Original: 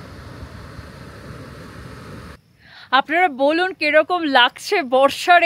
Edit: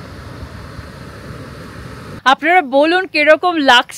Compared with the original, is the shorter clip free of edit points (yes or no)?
no